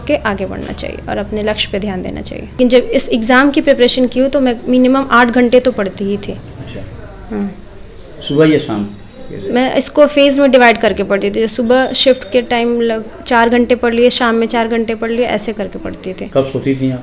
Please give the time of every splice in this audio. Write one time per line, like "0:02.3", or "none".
0:02.6